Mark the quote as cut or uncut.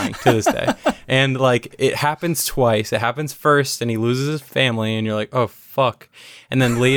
cut